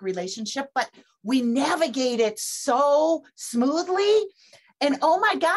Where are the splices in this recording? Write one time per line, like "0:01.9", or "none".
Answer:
none